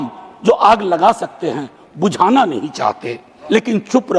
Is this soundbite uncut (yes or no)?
no